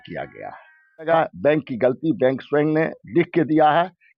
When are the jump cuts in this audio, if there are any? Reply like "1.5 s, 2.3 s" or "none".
1.1 s